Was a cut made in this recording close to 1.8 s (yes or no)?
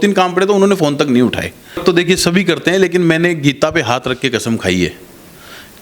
yes